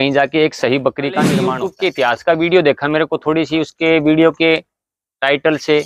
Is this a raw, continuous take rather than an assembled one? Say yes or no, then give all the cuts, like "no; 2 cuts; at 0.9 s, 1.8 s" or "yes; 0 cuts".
no; 1 cut; at 1.5 s